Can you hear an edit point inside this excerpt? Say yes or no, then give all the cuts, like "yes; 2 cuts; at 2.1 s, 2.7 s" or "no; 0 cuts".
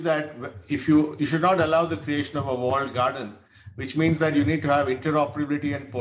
no; 0 cuts